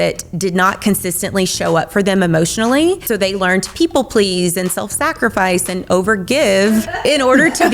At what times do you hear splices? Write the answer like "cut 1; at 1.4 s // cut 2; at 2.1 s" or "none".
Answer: cut 1; at 3.0 s // cut 2; at 6.9 s